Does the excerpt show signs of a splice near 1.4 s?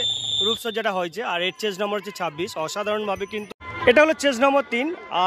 no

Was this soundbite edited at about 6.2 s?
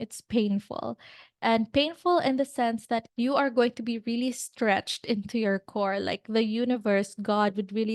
no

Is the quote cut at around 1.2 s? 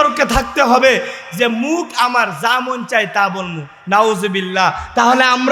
yes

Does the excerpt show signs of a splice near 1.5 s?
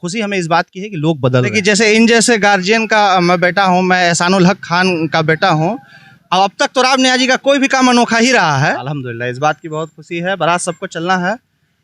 yes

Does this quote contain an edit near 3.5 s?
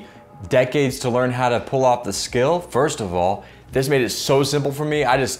yes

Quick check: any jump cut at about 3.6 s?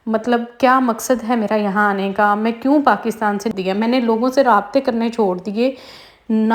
yes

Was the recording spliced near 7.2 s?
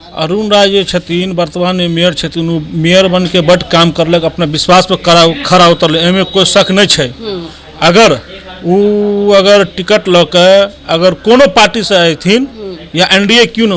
no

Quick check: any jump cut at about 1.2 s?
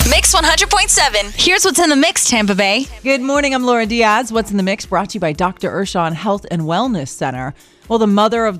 no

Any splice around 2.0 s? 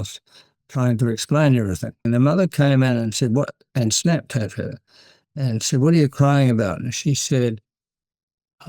yes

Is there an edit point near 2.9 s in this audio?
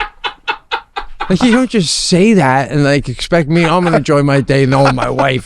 no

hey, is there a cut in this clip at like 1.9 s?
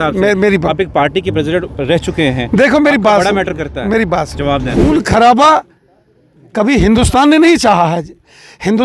no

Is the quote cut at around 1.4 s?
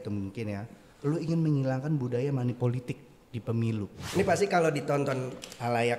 no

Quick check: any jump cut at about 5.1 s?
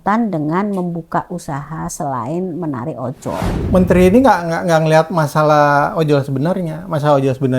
no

